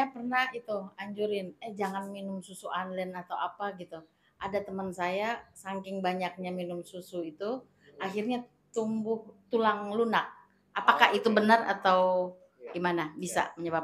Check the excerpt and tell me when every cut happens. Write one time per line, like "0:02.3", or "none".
none